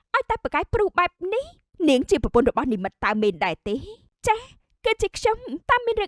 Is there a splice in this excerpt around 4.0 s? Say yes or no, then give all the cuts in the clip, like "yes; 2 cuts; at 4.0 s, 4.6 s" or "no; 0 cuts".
no; 1 cut; at 1.6 s